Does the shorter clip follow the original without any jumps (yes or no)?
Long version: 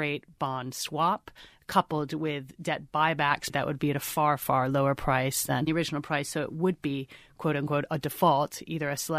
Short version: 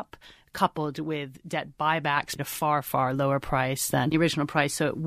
no